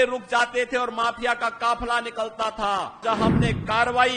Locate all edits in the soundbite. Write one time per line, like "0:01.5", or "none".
0:03.0